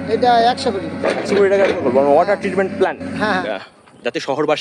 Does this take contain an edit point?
yes; 1 cut; at 3.4 s

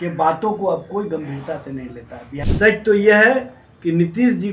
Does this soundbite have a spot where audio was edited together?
yes; 1 cut; at 2.4 s

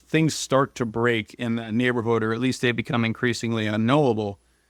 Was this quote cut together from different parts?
no; 0 cuts

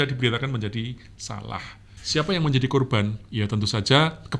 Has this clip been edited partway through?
no; 0 cuts

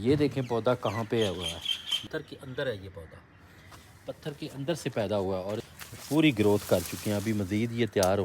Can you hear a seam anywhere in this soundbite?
yes; 2 cuts; at 1.9 s, 5.6 s

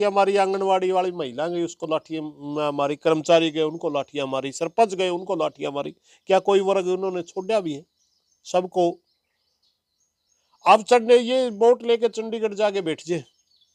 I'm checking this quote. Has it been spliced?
no; 0 cuts

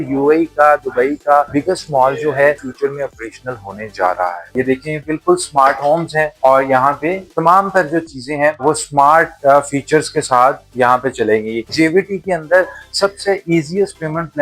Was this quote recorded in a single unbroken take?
no; 3 cuts; at 2.6 s, 4.4 s, 11.7 s

